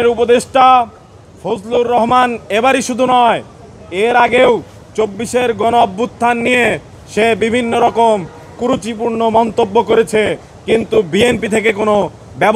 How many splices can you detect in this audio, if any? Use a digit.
0